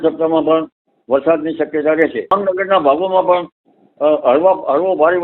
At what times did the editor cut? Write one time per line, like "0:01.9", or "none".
0:02.3

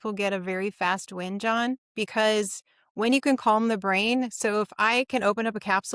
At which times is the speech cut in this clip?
none

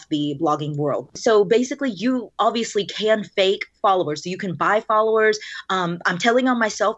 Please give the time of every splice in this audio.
0:01.2

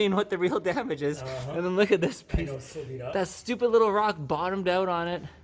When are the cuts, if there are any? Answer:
none

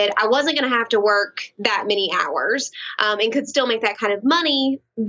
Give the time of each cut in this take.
none

